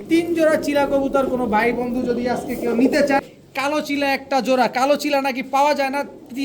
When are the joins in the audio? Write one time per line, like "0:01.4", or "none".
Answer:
0:03.2